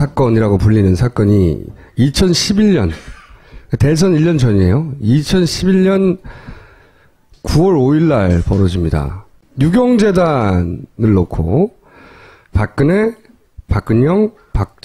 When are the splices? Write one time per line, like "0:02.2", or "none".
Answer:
none